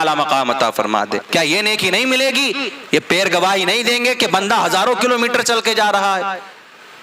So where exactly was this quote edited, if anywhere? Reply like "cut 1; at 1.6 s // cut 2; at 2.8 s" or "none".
cut 1; at 1.3 s